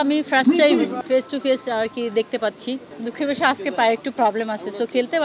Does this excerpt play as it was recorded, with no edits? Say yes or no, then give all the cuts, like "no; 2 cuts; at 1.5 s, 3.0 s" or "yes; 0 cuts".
no; 2 cuts; at 1.0 s, 2.9 s